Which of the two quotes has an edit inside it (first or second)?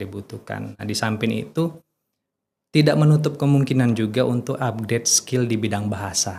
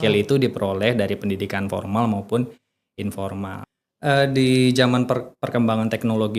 second